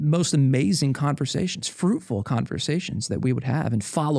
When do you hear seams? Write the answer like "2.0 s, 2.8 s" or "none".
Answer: none